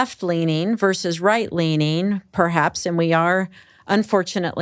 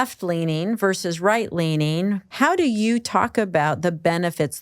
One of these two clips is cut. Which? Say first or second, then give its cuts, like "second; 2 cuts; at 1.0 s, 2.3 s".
second; 1 cut; at 2.2 s